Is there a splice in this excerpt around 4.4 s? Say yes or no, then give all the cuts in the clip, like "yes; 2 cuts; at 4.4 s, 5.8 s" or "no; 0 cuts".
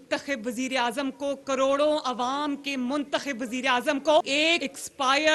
yes; 1 cut; at 4.4 s